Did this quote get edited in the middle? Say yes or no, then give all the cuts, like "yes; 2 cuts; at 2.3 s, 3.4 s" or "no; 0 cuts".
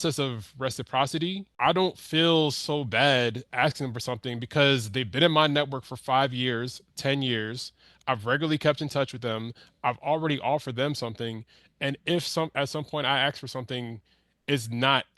yes; 1 cut; at 1.5 s